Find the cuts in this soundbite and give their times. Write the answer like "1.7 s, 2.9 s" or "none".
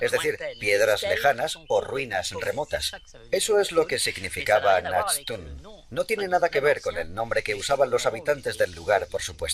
none